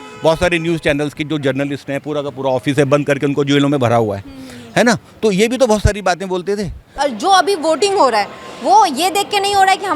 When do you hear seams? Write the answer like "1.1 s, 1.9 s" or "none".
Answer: 7.0 s